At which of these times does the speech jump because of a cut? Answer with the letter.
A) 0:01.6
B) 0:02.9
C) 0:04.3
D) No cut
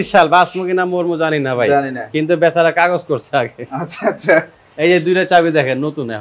D